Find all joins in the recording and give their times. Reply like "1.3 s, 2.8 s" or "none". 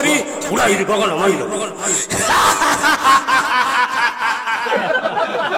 4.7 s